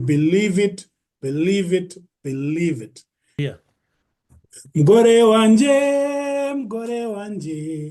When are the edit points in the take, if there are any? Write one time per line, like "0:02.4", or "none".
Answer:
0:03.3